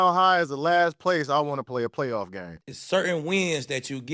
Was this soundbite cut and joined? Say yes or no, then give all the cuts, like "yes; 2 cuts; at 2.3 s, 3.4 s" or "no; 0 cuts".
yes; 1 cut; at 2.5 s